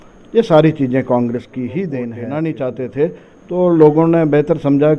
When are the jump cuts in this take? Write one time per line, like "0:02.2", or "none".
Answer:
0:02.2